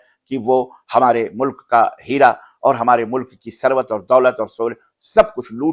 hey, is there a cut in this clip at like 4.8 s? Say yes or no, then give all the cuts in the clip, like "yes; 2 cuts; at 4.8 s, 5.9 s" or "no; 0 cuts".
no; 0 cuts